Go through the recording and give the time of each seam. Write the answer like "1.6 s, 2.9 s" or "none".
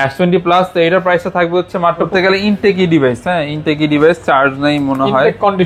2.1 s